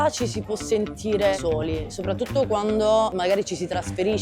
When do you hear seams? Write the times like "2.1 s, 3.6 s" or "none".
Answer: 1.4 s, 3.1 s